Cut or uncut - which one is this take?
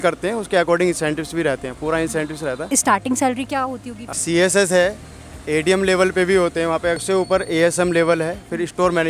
cut